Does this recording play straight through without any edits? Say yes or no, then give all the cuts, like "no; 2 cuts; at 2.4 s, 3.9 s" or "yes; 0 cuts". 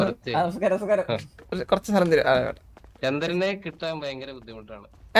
yes; 0 cuts